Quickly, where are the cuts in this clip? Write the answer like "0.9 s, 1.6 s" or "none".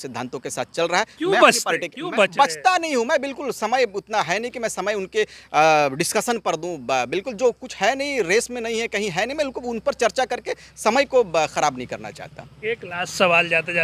none